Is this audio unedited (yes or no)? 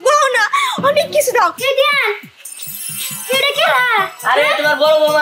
no